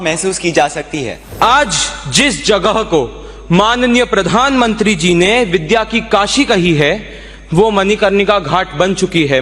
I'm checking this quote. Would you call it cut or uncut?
cut